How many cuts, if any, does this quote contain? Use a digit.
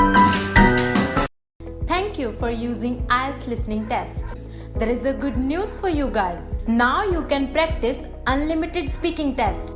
1